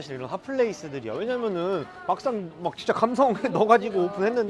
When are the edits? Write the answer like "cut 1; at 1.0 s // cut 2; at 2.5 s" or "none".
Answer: none